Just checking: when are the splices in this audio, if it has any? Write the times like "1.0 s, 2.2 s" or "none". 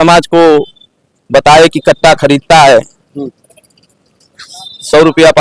none